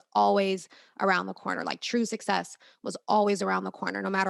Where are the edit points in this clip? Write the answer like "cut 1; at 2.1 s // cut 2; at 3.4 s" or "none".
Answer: none